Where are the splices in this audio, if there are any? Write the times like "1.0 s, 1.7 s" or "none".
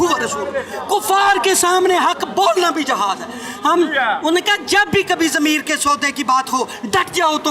none